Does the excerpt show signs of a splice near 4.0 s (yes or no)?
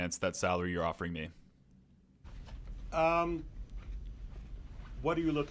no